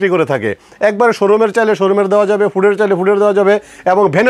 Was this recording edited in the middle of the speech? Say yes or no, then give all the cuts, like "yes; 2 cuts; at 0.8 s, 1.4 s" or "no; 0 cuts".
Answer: no; 0 cuts